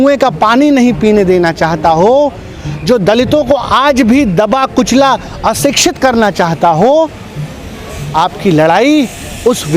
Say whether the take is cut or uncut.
uncut